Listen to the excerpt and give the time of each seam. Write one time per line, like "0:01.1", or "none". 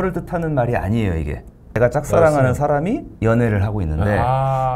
0:01.8
0:03.1